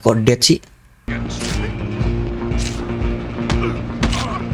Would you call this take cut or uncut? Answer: cut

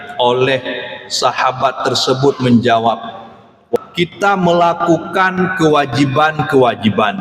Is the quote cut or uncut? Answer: cut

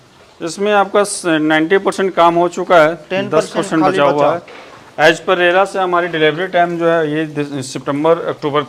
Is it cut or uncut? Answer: uncut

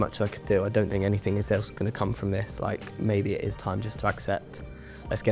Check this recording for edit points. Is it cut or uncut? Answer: uncut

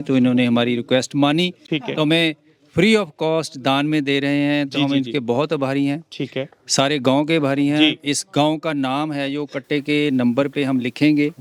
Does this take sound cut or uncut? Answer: uncut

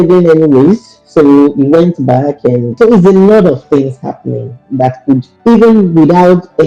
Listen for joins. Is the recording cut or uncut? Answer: cut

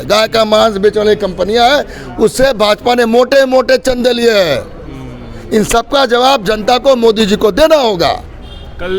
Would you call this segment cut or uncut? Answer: uncut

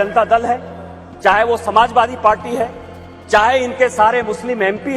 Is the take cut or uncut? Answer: uncut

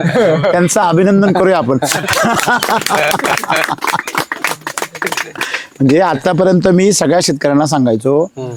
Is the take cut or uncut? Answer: uncut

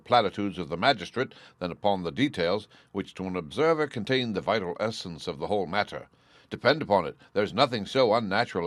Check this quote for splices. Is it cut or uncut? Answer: uncut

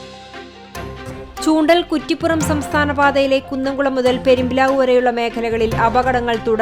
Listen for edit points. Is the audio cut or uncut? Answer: uncut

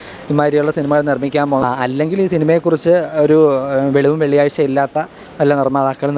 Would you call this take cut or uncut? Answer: cut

